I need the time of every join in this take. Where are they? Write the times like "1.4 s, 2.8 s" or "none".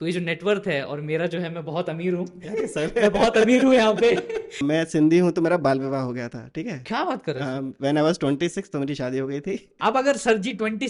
4.6 s